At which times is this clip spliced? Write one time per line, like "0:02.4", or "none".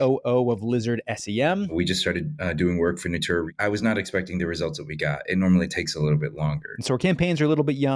0:01.7
0:03.5
0:06.7

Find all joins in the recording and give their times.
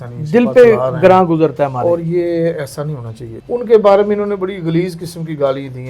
0:03.3

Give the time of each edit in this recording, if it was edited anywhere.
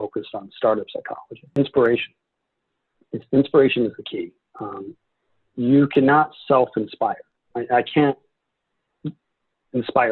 0:01.4

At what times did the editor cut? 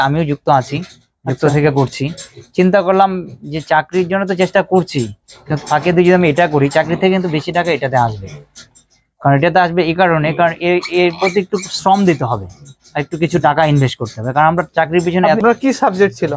0:15.4

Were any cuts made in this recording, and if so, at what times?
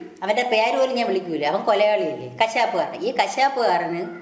none

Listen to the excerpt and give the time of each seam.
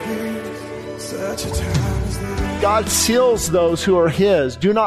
0:02.6

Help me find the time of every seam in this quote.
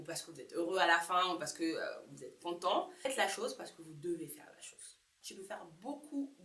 0:03.1
0:05.2

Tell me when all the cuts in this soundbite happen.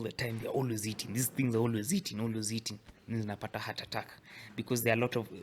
none

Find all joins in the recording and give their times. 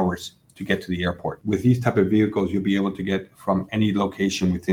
0:01.4

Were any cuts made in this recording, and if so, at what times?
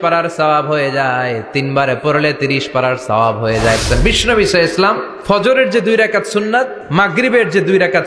0:03.8
0:05.1
0:06.8

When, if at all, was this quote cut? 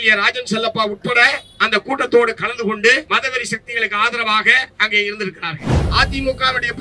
0:03.0
0:05.7

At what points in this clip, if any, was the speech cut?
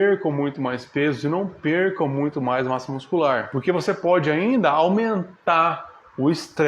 0:03.5

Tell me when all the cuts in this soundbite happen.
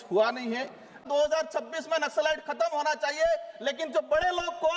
0:01.0

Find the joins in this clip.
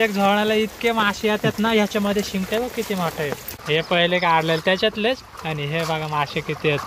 0:03.5

